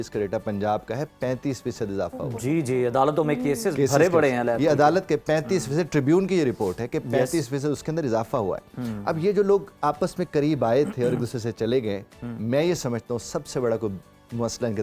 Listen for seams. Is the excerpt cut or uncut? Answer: uncut